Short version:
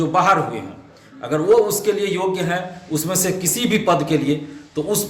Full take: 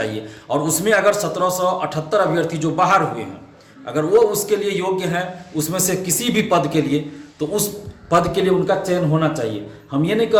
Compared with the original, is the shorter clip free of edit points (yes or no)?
yes